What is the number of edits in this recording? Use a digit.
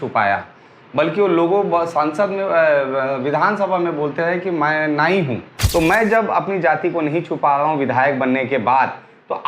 1